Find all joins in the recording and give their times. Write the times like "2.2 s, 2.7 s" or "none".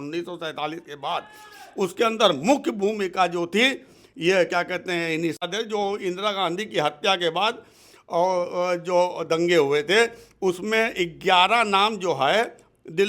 5.4 s

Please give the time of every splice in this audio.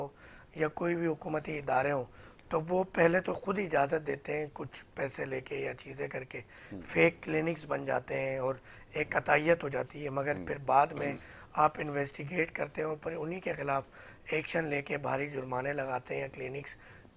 none

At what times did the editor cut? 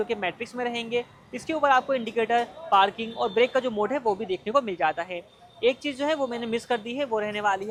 none

